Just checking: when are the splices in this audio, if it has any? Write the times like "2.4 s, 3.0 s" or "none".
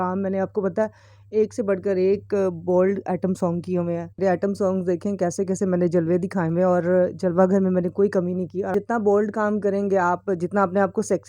4.1 s, 8.7 s